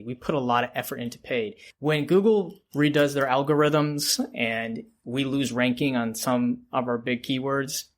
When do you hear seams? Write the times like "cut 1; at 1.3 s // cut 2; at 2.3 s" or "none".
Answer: cut 1; at 1.6 s